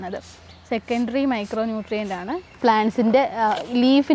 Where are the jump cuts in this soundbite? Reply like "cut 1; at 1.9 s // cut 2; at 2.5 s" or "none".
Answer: cut 1; at 2.6 s